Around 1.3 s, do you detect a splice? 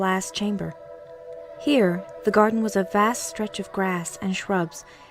yes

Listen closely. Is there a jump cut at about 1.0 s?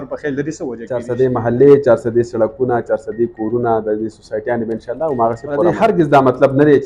yes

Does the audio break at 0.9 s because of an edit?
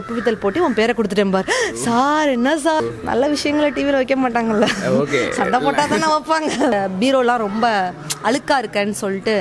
no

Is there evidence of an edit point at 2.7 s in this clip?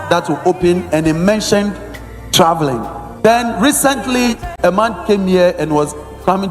no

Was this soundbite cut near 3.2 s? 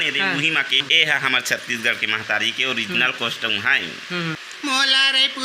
no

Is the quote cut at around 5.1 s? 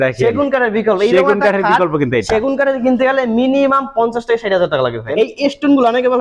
yes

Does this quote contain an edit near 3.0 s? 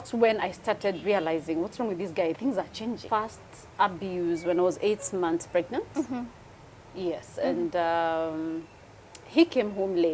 yes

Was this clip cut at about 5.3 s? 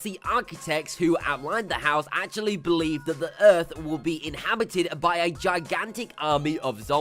yes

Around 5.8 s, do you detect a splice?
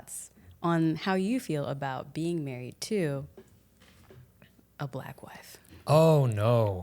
yes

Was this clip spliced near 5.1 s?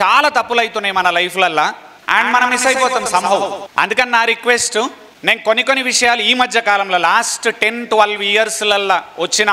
yes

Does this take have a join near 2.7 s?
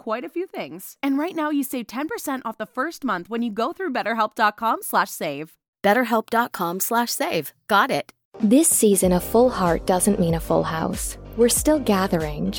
no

